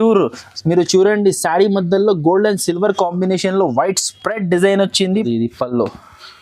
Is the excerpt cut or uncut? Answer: cut